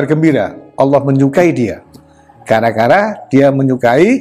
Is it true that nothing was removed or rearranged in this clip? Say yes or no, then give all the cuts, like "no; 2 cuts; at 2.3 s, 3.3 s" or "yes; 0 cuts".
yes; 0 cuts